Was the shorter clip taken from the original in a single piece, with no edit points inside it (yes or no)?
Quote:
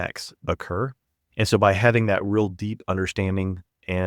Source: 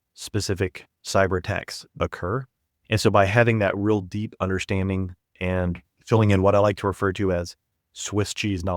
yes